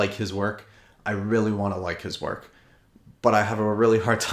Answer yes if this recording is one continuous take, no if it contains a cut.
yes